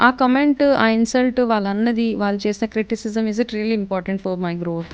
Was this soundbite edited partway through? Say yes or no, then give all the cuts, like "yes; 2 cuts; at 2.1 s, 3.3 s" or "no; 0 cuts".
no; 0 cuts